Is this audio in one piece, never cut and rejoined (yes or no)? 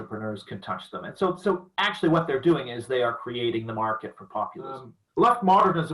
no